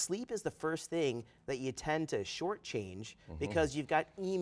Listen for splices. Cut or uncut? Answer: uncut